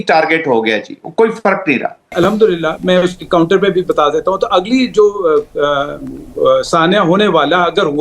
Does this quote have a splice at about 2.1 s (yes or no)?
yes